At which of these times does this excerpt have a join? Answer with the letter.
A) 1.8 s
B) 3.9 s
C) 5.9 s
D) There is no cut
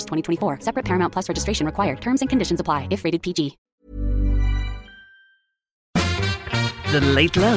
C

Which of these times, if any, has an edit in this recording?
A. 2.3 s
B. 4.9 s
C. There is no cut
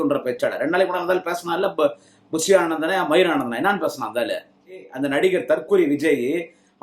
B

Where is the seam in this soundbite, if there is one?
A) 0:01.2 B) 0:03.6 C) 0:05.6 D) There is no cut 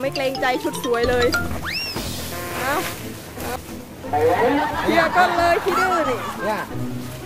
B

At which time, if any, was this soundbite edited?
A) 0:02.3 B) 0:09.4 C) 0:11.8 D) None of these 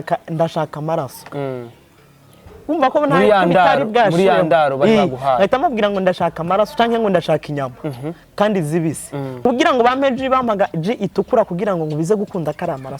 B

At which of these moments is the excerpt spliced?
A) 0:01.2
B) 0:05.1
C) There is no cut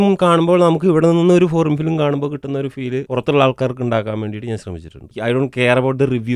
B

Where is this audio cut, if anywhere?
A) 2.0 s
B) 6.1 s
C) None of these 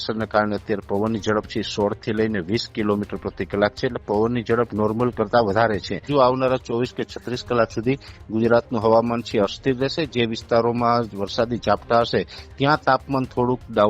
B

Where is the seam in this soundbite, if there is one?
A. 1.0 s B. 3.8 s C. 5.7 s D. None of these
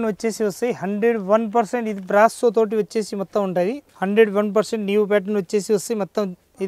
B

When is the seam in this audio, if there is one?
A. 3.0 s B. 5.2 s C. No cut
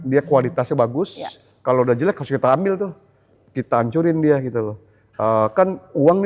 C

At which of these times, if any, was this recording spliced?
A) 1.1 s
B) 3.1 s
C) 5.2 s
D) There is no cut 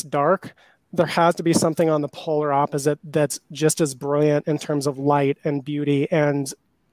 D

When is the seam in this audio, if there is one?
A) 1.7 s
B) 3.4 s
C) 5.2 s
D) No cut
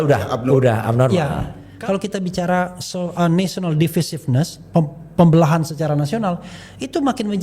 A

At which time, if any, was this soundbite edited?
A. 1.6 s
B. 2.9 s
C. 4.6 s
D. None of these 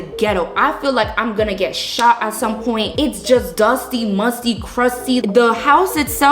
D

